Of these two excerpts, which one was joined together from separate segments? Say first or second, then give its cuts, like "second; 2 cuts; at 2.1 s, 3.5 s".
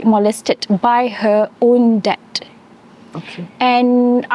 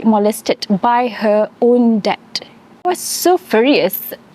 second; 1 cut; at 2.9 s